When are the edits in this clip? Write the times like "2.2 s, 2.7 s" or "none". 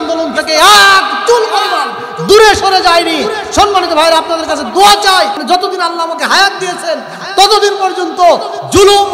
5.4 s